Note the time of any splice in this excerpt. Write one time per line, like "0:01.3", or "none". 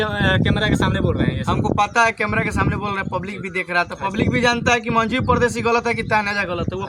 none

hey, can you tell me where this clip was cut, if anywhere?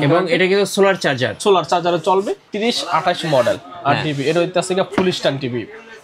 0:02.5

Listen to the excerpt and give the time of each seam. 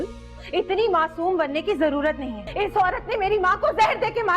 0:02.4

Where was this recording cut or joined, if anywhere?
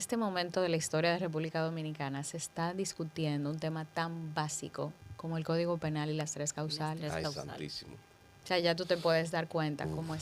0:05.1

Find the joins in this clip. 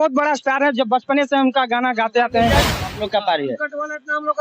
0:02.7

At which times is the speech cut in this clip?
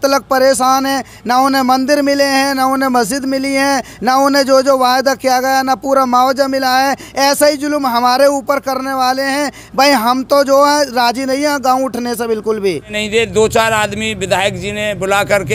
0:12.9

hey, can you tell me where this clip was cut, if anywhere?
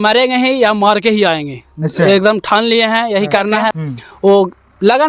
0:03.7

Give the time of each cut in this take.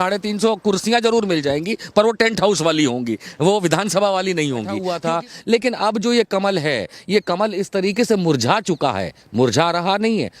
0:04.9

